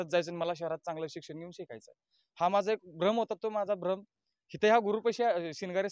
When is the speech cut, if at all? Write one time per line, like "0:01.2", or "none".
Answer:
none